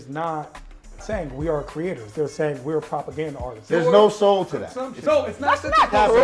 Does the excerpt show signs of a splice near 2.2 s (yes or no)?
no